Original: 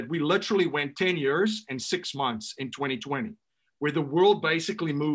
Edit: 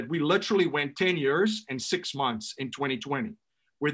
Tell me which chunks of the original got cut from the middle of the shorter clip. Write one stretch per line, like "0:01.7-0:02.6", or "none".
none